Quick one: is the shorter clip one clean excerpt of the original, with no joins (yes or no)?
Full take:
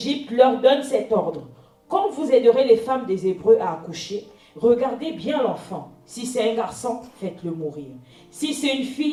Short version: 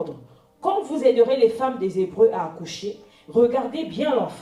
yes